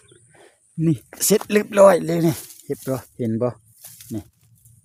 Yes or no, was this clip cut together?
no